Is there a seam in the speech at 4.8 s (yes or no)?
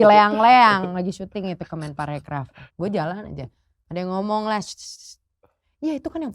no